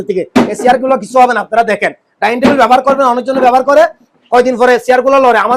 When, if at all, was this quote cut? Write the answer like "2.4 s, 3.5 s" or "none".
none